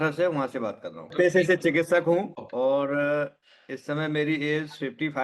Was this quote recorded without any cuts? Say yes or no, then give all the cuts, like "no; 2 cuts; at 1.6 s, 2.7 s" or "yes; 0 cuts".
no; 2 cuts; at 1.1 s, 2.3 s